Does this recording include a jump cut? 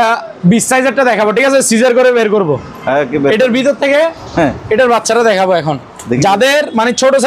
no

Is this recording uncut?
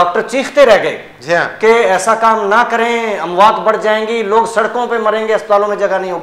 yes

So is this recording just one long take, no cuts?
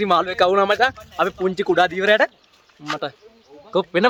yes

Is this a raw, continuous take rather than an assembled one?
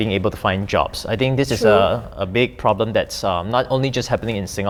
yes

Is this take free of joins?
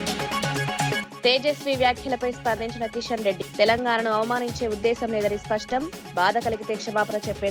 no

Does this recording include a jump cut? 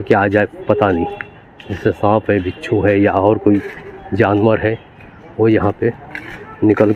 no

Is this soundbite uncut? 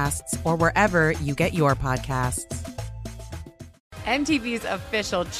no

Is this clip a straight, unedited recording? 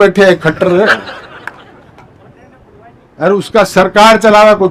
yes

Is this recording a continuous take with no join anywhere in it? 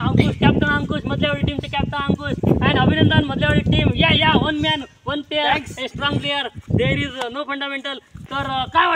yes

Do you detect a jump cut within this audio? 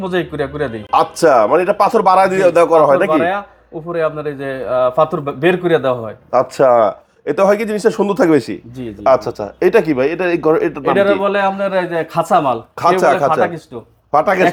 no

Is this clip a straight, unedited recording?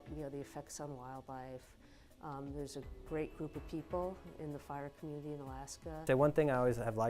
no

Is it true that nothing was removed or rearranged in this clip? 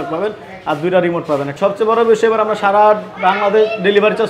no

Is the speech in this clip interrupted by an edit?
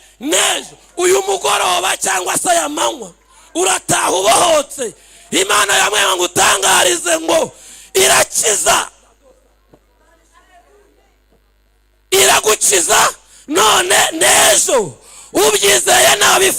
no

